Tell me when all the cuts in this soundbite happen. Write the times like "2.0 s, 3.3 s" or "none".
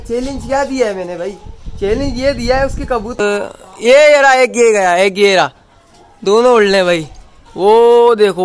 3.2 s